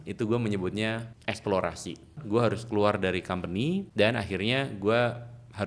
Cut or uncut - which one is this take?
cut